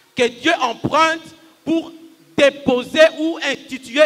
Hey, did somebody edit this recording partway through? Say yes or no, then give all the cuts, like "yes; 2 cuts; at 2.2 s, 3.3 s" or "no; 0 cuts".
no; 0 cuts